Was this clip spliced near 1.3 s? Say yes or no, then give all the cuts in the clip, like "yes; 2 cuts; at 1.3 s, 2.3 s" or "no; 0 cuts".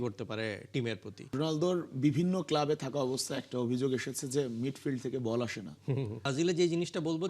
yes; 2 cuts; at 1.3 s, 6.3 s